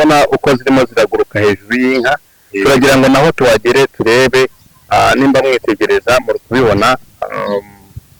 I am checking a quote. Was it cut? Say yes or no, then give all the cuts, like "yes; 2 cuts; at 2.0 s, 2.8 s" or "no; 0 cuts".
no; 0 cuts